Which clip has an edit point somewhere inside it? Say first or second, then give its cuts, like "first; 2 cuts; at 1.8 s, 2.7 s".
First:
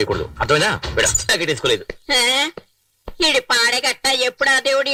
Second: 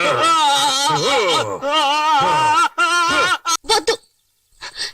second; 1 cut; at 3.5 s